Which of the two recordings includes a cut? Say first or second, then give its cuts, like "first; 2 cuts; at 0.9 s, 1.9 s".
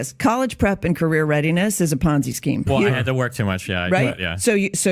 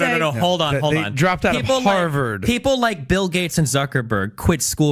first; 1 cut; at 2.7 s